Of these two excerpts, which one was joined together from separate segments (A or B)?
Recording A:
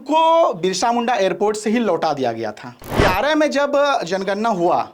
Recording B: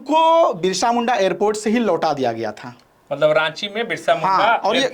A